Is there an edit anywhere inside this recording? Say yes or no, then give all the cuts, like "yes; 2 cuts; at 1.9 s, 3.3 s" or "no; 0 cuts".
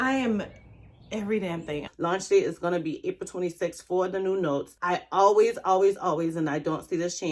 yes; 1 cut; at 1.8 s